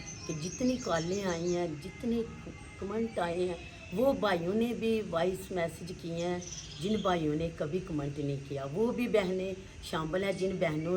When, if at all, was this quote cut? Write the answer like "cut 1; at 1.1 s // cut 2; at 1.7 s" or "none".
none